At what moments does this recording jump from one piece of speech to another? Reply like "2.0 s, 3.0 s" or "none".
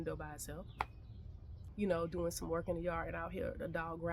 1.6 s